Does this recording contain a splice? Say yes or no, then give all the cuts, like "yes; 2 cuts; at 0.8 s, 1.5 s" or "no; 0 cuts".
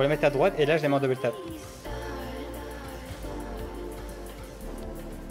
no; 0 cuts